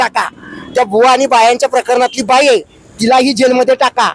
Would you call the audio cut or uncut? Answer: uncut